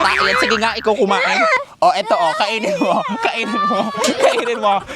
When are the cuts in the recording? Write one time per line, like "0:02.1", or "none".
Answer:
0:01.6